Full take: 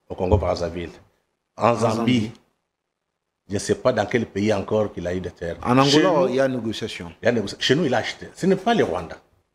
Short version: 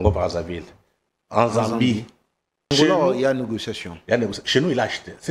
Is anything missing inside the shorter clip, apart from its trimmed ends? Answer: yes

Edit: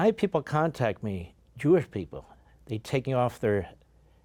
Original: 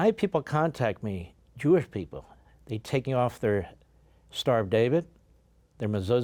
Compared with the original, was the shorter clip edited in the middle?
no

